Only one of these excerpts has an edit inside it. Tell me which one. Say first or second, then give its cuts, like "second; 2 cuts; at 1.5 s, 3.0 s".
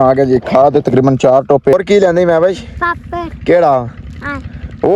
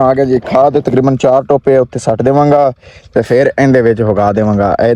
first; 1 cut; at 1.7 s